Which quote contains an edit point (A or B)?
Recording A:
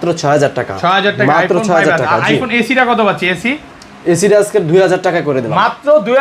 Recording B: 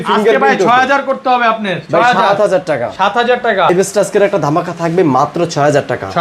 B